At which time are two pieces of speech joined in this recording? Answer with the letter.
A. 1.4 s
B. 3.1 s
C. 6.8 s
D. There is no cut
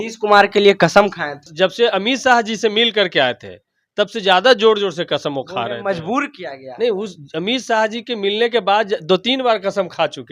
A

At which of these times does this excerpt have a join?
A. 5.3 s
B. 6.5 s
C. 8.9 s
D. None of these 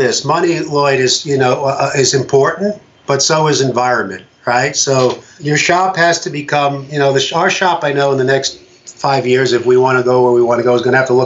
A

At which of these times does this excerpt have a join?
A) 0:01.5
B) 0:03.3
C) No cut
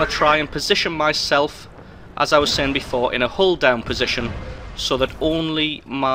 C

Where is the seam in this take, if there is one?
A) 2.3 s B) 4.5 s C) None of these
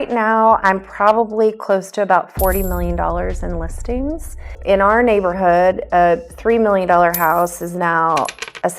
B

